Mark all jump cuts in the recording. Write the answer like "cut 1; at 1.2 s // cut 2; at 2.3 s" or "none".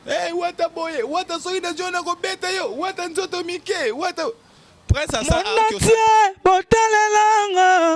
cut 1; at 5.4 s